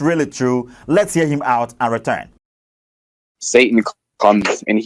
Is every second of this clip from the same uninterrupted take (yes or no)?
yes